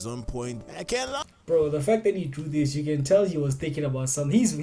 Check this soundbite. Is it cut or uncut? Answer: uncut